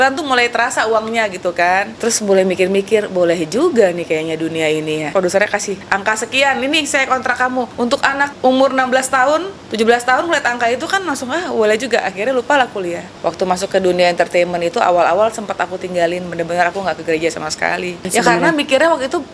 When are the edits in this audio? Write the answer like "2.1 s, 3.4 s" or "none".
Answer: 1.9 s, 5.1 s, 5.8 s, 7.8 s, 9.6 s, 13.1 s, 18.1 s